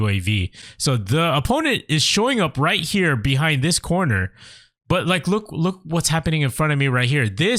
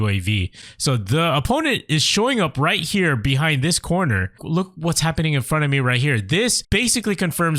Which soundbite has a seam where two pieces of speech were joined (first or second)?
second